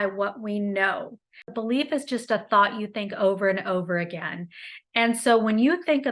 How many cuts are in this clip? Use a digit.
1